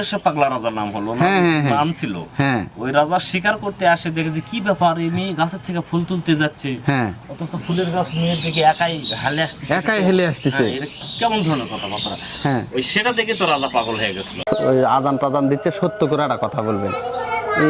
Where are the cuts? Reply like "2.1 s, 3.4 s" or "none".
14.4 s